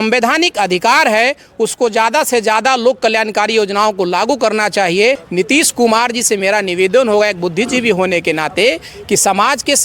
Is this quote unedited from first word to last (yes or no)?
no